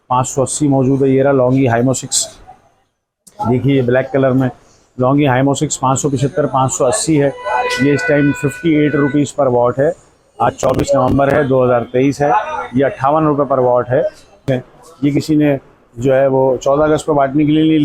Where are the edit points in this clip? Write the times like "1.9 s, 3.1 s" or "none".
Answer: 14.4 s